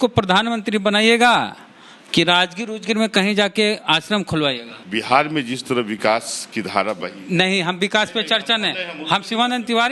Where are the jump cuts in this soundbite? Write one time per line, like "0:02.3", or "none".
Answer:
0:04.7

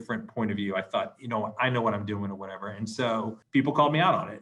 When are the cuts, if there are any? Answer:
0:03.4

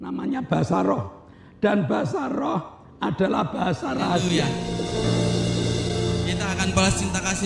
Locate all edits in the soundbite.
0:04.3

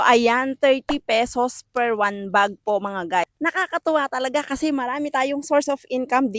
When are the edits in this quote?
0:03.3

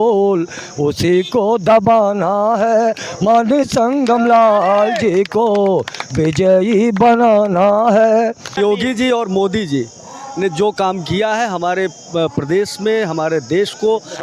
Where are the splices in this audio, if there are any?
0:08.6

